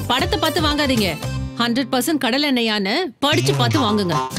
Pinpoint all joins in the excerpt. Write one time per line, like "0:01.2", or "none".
none